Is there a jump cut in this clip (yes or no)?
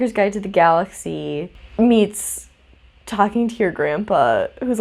no